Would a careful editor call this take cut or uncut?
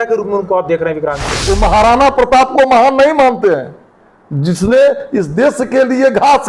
cut